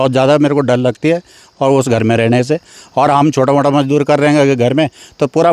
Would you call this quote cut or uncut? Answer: uncut